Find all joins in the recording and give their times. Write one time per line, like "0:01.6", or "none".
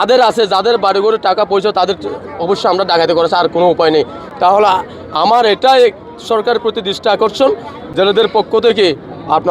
none